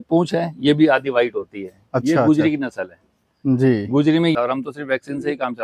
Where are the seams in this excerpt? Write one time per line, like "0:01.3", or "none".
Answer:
0:04.3